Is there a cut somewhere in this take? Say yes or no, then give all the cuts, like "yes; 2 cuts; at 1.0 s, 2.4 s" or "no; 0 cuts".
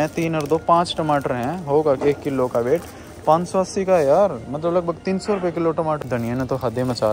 yes; 1 cut; at 6.0 s